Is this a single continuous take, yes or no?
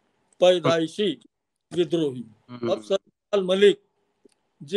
no